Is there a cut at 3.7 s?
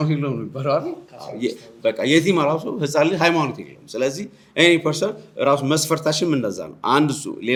no; 0 cuts

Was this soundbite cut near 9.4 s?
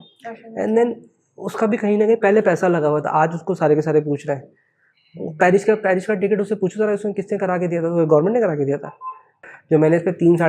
yes; 1 cut; at 9.4 s

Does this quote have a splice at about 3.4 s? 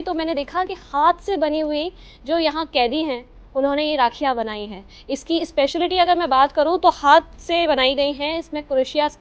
no; 0 cuts

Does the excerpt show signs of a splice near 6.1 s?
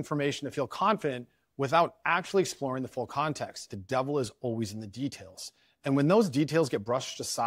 no; 1 cut; at 3.7 s

